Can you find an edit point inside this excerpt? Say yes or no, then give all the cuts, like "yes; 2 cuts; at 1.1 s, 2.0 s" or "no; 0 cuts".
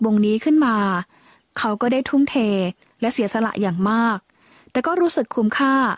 no; 0 cuts